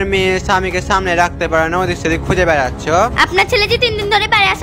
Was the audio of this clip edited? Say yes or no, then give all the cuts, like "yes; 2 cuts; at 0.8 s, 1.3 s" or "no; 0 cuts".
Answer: yes; 1 cut; at 3.1 s